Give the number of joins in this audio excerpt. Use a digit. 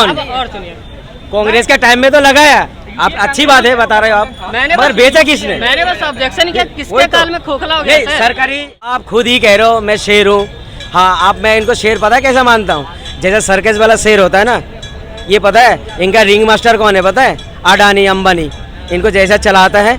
1